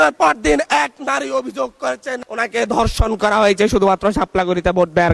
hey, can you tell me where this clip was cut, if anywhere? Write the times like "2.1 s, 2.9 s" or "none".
none

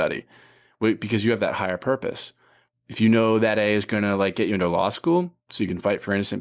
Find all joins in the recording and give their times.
none

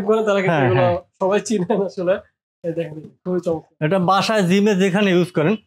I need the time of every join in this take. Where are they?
none

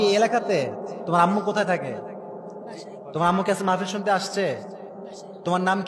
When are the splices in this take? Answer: none

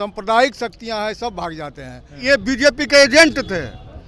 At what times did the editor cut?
2.2 s

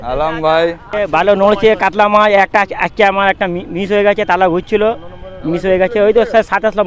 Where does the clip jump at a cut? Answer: 0.9 s

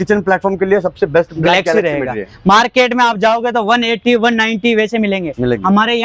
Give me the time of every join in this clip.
none

